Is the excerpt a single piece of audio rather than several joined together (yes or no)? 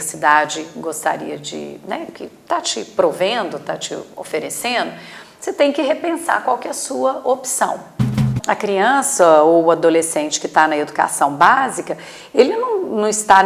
no